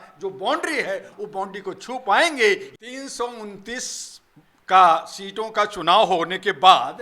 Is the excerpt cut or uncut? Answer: cut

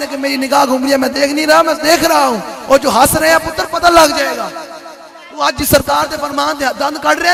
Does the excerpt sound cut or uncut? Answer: uncut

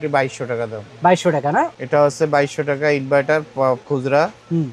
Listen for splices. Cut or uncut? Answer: cut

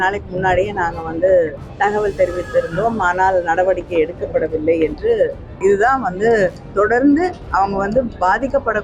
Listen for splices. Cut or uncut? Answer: cut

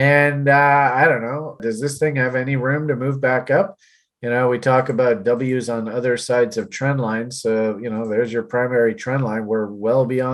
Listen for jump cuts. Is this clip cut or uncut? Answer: cut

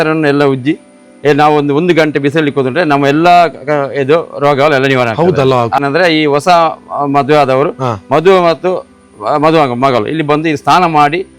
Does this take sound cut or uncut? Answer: cut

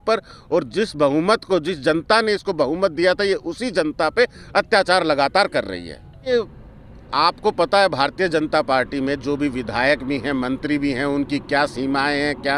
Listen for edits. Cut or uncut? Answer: cut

